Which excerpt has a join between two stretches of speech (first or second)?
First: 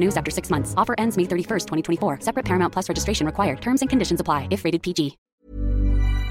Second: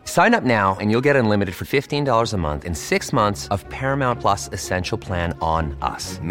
first